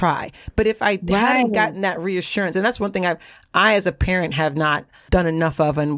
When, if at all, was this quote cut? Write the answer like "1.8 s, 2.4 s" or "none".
5.0 s